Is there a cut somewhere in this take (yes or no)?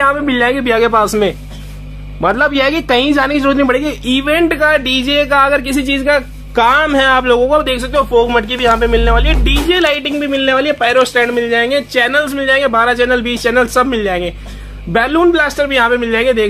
no